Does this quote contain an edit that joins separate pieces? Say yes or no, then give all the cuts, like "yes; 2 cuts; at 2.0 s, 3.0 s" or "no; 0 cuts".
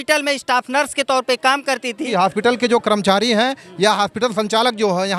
yes; 1 cut; at 2.0 s